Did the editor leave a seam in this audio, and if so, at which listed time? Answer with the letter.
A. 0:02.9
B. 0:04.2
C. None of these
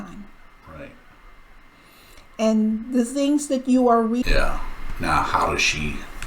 B